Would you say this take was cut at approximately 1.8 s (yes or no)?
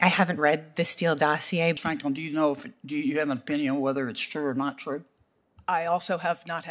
yes